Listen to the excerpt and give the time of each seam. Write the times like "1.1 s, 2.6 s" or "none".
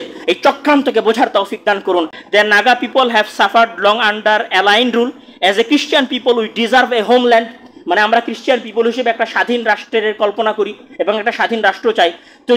2.2 s